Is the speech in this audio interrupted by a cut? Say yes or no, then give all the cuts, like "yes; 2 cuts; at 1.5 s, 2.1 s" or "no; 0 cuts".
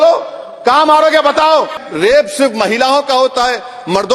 yes; 1 cut; at 1.7 s